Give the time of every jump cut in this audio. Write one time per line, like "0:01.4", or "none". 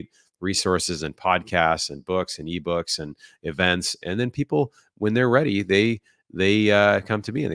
none